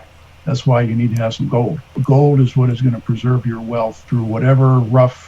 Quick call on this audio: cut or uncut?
cut